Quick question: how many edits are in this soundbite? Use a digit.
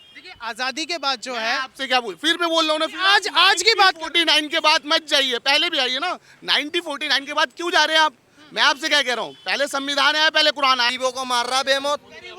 1